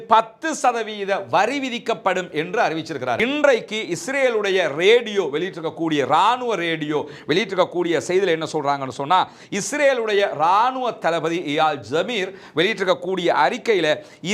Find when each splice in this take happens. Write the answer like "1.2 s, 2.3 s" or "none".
3.2 s